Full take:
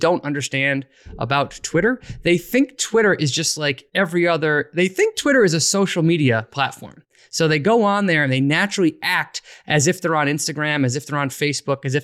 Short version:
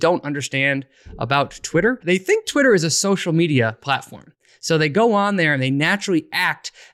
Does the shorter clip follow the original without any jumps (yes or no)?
no